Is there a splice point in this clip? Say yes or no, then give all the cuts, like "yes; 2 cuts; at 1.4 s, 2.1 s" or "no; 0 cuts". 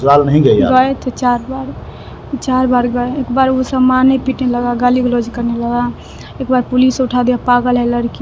no; 0 cuts